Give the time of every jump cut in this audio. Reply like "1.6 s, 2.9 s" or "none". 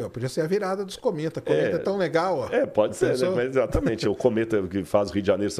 none